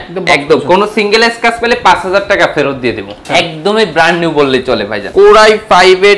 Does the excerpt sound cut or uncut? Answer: cut